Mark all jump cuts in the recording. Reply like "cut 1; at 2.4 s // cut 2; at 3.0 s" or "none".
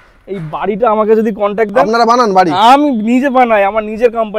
none

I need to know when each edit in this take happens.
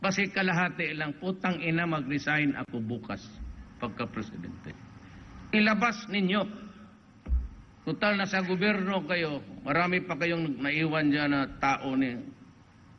cut 1; at 3.9 s

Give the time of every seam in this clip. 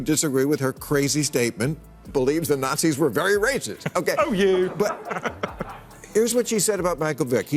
cut 1; at 2.1 s

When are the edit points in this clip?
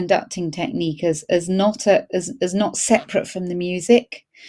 none

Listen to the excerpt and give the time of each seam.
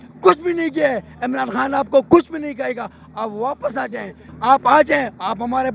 none

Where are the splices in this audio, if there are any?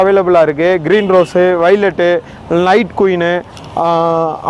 none

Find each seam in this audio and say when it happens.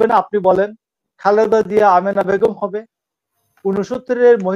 cut 1; at 1.0 s

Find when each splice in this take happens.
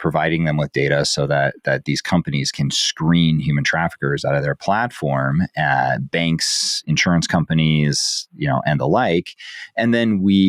none

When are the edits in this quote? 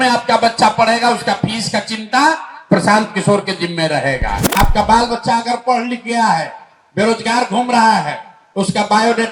cut 1; at 4.6 s

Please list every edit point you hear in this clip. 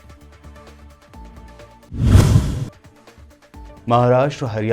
cut 1; at 1.6 s

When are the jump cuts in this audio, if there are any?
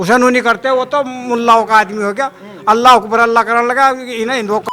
none

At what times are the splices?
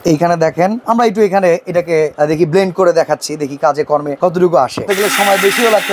cut 1; at 0.8 s // cut 2; at 2.1 s // cut 3; at 4.1 s // cut 4; at 4.9 s

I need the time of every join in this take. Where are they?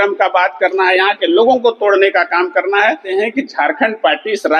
cut 1; at 3.0 s

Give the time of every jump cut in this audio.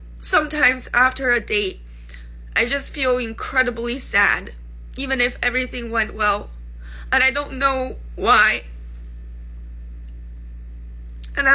cut 1; at 10.1 s

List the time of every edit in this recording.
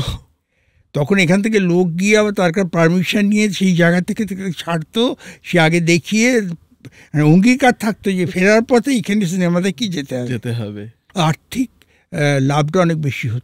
cut 1; at 11.0 s

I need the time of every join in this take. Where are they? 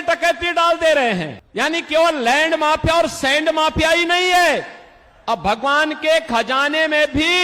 cut 1; at 1.4 s

